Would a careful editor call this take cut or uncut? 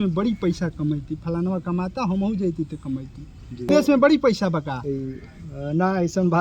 cut